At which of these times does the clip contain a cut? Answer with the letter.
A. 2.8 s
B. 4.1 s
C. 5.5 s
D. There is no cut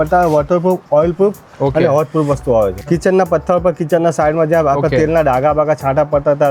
A